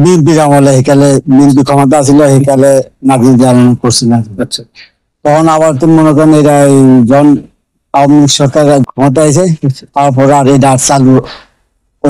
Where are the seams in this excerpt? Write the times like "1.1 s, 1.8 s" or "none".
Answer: none